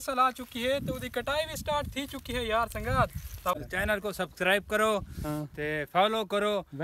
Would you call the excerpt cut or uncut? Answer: cut